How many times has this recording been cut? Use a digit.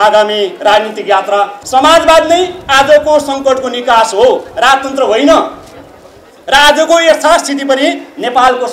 1